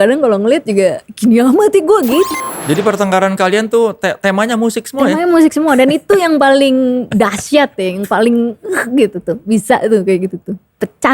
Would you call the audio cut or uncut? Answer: cut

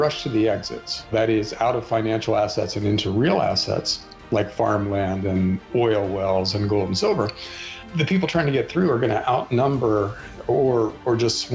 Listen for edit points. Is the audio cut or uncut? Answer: cut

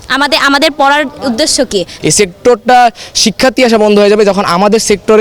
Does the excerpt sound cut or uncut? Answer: cut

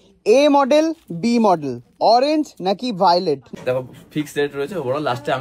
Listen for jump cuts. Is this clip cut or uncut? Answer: cut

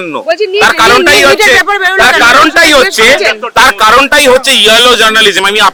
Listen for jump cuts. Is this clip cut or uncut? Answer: uncut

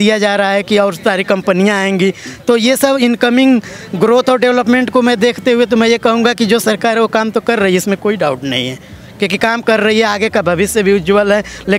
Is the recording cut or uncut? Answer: uncut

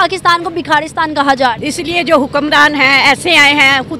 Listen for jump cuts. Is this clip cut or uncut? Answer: cut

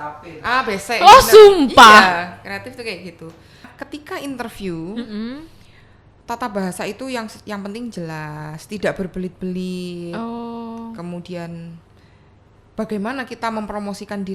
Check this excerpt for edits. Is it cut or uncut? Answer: cut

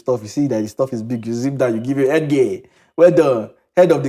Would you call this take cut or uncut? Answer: uncut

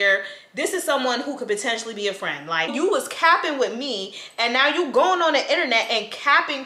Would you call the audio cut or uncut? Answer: cut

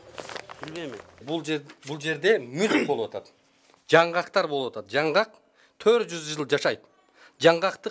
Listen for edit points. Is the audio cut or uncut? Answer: cut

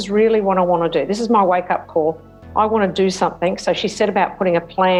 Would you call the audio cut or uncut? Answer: uncut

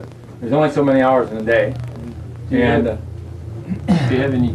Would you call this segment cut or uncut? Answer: uncut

